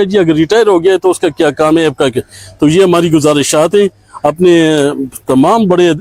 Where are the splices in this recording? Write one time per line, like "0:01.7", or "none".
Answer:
none